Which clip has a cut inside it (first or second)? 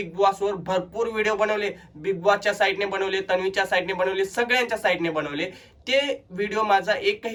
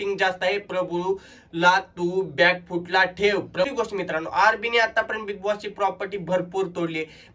second